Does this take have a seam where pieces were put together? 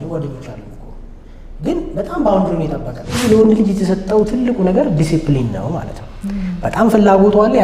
yes; 1 cut; at 3.2 s

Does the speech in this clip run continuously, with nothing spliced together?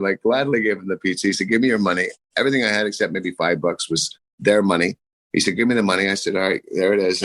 yes; 0 cuts

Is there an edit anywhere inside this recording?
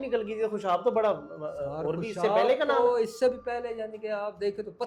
no; 0 cuts

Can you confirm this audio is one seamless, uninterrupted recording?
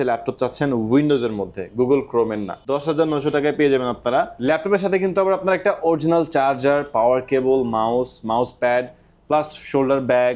no; 2 cuts; at 2.5 s, 4.3 s

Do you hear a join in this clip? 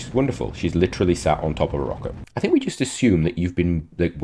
yes; 1 cut; at 2.1 s

